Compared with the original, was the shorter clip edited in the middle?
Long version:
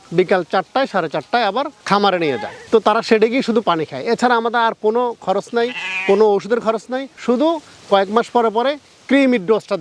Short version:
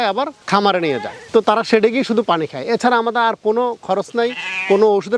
no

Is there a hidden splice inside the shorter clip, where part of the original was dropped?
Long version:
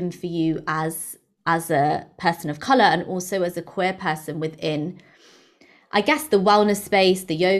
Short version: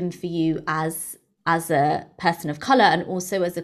no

